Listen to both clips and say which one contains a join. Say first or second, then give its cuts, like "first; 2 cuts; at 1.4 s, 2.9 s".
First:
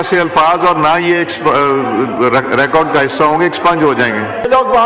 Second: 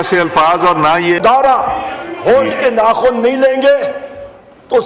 second; 1 cut; at 1.2 s